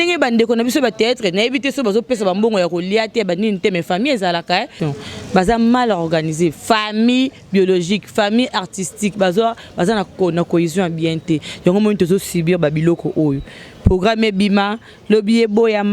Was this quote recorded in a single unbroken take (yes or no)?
no